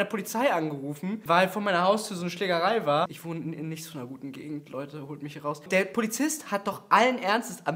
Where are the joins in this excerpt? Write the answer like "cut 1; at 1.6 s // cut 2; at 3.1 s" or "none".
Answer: none

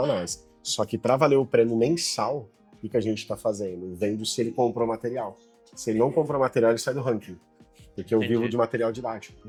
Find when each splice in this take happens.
none

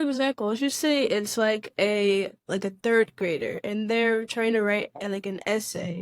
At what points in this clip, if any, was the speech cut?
none

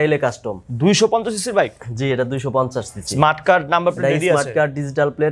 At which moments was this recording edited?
none

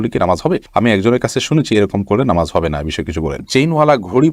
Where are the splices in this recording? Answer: cut 1; at 3.4 s

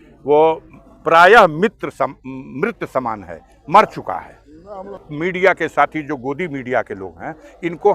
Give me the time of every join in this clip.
cut 1; at 5.1 s

